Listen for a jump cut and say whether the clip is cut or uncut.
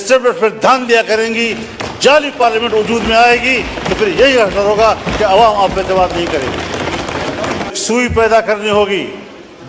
cut